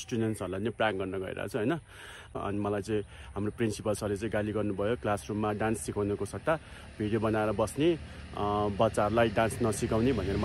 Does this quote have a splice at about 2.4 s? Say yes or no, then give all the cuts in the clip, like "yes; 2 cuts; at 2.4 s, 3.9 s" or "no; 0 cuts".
yes; 1 cut; at 2.4 s